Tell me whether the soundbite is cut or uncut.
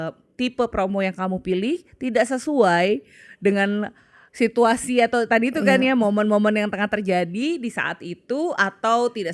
uncut